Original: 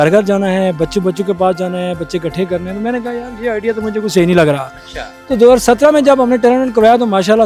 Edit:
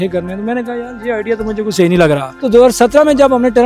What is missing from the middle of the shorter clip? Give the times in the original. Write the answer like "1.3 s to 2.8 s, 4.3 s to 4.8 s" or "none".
4.7 s to 5.2 s